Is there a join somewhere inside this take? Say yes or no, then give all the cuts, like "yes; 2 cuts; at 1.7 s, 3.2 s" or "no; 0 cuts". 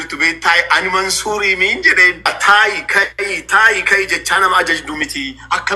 yes; 1 cut; at 2.3 s